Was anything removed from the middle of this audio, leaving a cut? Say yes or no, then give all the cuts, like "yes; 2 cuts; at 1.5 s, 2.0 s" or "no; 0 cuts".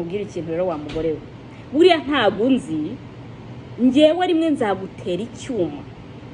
no; 0 cuts